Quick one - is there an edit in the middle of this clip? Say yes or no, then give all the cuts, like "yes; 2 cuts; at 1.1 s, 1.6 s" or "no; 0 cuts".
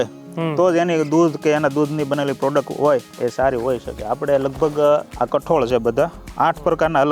yes; 1 cut; at 3.1 s